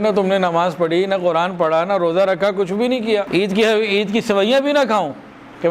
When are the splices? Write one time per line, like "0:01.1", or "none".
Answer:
0:03.3